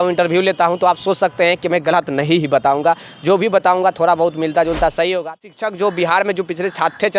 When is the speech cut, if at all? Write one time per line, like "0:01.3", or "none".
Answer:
0:05.3